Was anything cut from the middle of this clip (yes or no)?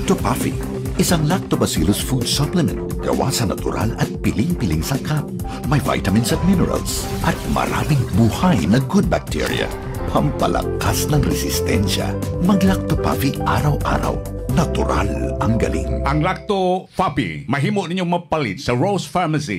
yes